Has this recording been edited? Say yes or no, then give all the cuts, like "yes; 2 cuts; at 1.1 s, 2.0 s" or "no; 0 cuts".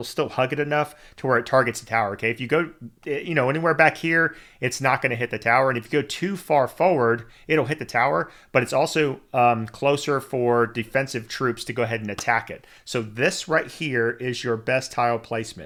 no; 0 cuts